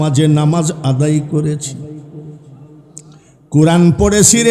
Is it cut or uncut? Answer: uncut